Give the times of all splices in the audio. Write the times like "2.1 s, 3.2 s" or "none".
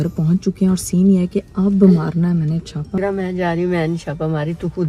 3.0 s

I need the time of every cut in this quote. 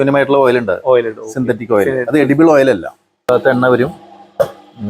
3.3 s

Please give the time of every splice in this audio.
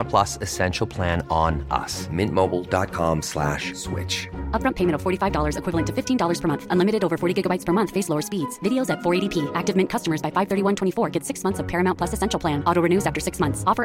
none

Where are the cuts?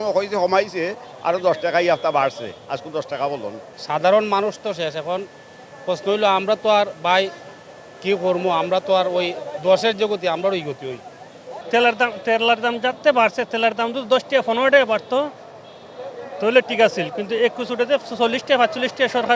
3.7 s, 11.6 s

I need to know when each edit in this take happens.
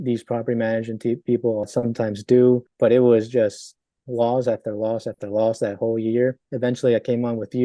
1.7 s, 2.7 s, 6.5 s

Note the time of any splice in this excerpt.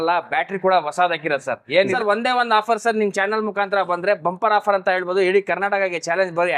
1.8 s

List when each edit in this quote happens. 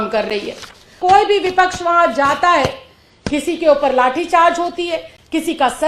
0.9 s

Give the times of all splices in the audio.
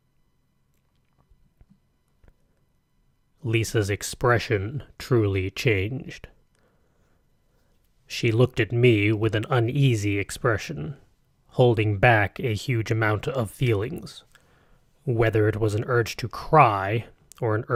none

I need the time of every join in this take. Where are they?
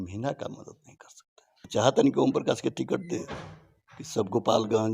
1.7 s

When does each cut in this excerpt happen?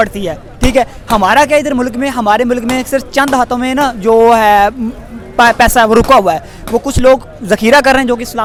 none

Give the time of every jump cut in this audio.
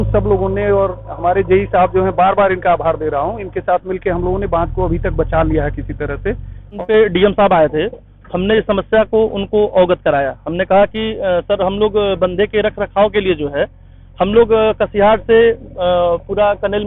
6.8 s

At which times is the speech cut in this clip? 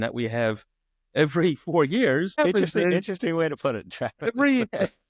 2.4 s

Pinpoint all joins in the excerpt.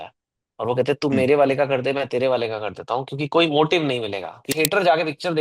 4.5 s

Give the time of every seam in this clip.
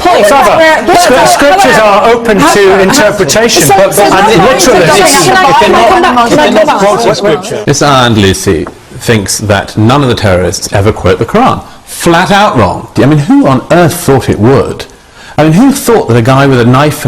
7.5 s, 12.9 s

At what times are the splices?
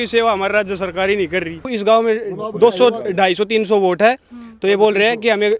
1.7 s

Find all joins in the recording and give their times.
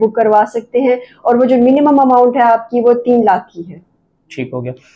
none

